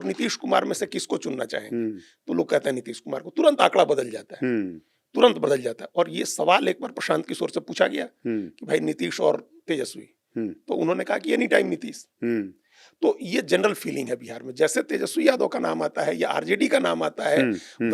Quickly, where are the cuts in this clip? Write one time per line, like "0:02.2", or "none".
none